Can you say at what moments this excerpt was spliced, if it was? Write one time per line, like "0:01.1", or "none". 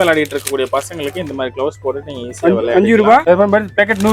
0:03.2